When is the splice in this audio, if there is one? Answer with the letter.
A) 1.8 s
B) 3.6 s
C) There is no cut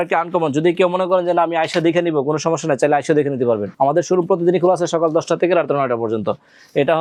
C